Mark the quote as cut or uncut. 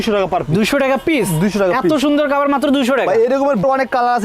uncut